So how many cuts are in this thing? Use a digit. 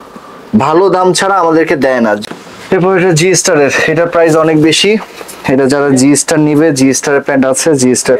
1